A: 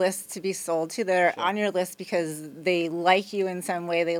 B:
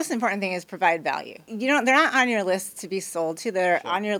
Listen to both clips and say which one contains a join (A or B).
B